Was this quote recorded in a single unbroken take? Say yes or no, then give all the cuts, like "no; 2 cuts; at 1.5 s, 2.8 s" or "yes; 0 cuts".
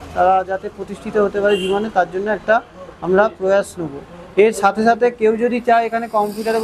yes; 0 cuts